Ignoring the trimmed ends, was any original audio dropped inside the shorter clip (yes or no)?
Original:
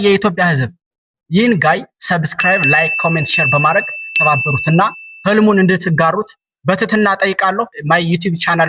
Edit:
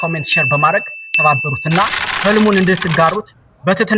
no